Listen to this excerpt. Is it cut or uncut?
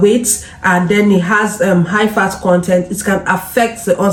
uncut